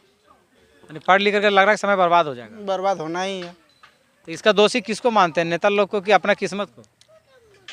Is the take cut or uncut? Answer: uncut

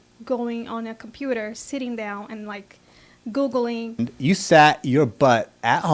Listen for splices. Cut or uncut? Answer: cut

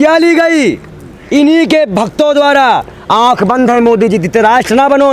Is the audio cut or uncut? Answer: uncut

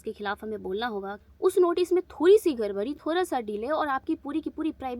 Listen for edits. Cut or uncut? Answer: cut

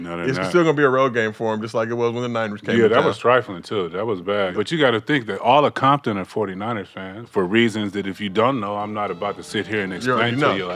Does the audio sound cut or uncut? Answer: cut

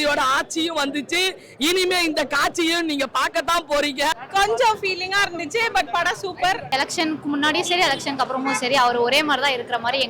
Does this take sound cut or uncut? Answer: cut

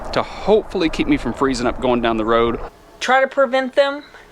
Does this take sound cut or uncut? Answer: cut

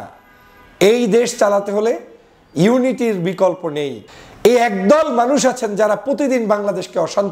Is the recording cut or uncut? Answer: cut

